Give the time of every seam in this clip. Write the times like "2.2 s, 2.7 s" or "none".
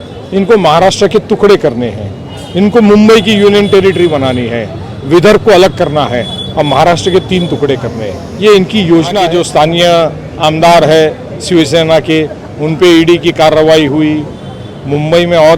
9.2 s